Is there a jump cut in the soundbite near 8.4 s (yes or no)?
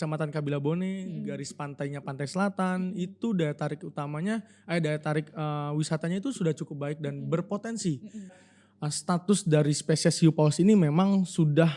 yes